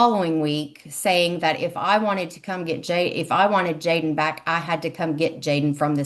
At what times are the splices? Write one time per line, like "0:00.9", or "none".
none